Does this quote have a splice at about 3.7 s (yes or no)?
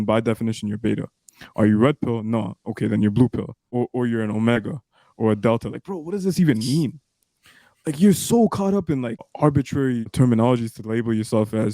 yes